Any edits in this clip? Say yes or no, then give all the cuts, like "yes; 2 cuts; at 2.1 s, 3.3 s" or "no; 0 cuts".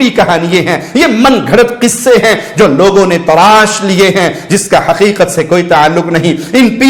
no; 0 cuts